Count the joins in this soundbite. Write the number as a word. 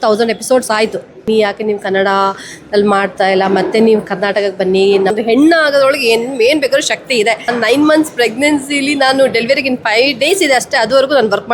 three